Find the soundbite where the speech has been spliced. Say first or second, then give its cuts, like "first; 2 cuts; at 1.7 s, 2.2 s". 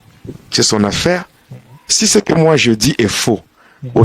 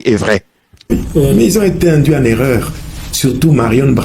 second; 1 cut; at 0.9 s